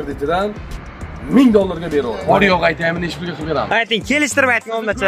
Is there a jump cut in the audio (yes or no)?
yes